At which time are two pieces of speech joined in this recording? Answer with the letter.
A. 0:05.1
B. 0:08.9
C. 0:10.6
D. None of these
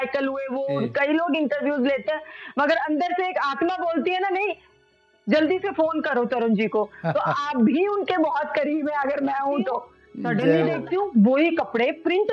C